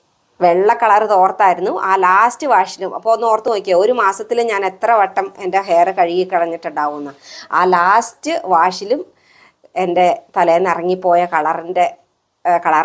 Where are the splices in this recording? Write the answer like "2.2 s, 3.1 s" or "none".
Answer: none